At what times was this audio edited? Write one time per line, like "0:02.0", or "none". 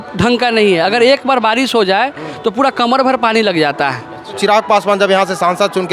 0:04.4